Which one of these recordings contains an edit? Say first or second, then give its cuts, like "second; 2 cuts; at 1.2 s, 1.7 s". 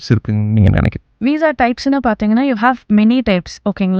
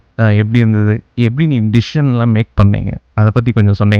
first; 1 cut; at 1.1 s